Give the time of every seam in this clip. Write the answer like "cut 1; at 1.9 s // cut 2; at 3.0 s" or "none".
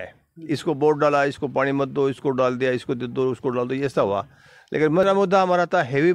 cut 1; at 5.0 s